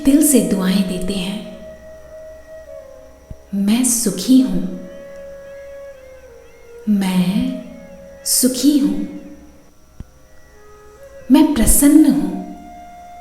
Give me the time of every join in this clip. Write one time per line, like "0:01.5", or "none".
0:01.5
0:03.2
0:04.9
0:06.9